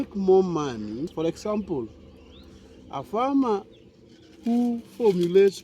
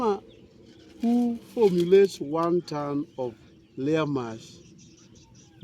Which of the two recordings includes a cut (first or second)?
first